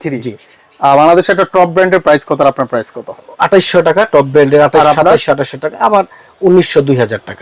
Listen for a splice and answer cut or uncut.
uncut